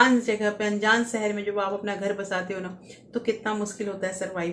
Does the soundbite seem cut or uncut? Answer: uncut